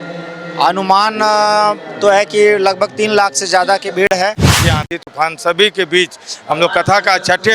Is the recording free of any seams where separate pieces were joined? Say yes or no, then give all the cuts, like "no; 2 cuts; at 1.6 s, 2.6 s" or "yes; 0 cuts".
no; 1 cut; at 4.5 s